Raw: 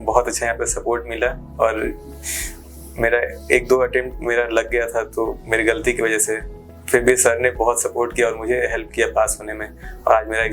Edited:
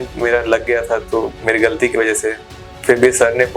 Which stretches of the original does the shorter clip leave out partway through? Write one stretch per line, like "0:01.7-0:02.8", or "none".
none